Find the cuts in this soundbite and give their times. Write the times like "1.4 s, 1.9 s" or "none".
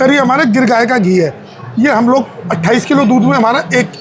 none